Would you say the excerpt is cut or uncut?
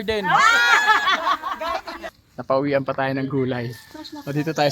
cut